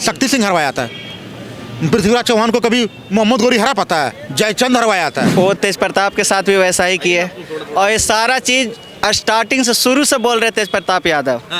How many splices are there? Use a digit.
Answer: 1